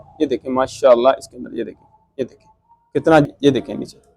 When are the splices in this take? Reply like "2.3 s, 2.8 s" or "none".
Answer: 3.2 s